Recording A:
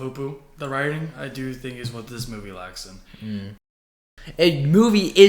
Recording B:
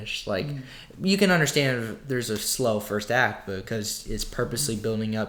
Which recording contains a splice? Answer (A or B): A